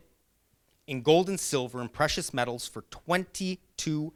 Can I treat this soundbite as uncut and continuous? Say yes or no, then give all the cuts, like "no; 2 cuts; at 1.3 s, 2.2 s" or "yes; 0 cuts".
yes; 0 cuts